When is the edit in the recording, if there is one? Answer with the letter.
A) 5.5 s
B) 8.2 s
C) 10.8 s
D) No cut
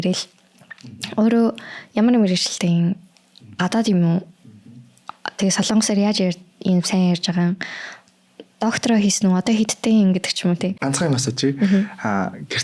C